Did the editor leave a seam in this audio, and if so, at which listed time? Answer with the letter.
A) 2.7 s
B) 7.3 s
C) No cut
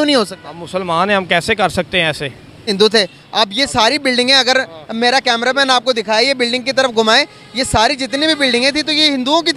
A